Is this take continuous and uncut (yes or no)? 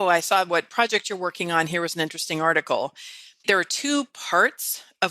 no